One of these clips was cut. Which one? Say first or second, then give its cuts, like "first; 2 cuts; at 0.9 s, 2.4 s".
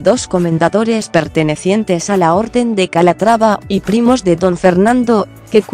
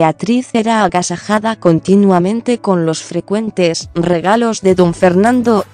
first; 1 cut; at 2.8 s